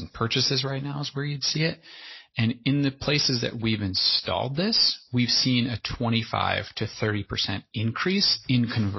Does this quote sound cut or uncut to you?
uncut